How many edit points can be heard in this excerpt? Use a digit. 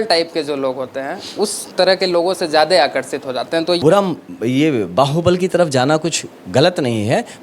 1